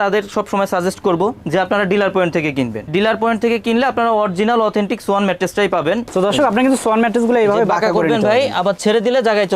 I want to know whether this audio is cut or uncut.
cut